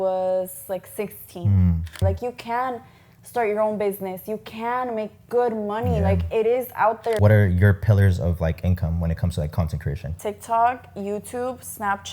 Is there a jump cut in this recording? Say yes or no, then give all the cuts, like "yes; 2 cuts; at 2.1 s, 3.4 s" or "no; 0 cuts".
yes; 3 cuts; at 2.0 s, 7.2 s, 10.1 s